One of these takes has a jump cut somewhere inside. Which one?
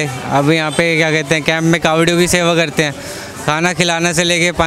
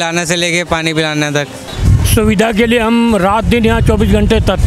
second; 1 cut; at 1.7 s

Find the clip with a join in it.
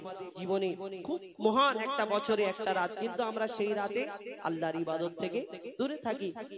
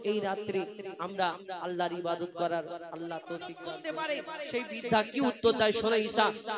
second; 1 cut; at 3.6 s

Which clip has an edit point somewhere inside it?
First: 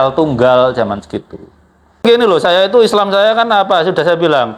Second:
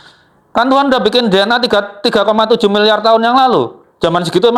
first; 1 cut; at 2.0 s

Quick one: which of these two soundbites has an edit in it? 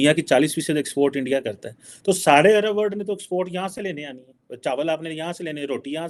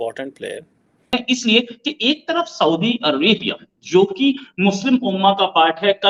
second; 1 cut; at 1.1 s

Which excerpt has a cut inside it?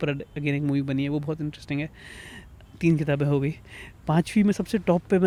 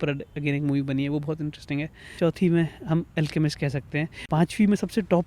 second; 2 cuts; at 2.0 s, 4.2 s

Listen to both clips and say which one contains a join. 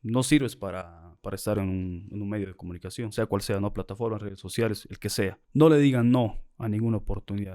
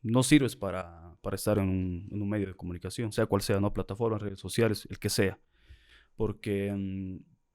first; 1 cut; at 5.4 s

